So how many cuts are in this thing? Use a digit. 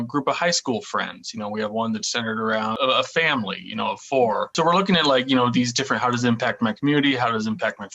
2